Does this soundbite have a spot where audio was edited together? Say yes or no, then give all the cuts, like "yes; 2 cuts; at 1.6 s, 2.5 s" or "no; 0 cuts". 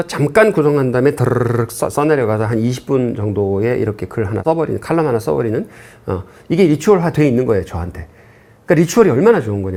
no; 0 cuts